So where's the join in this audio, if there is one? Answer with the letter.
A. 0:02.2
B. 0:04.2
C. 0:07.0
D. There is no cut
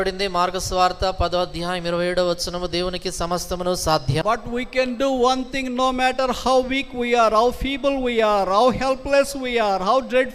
B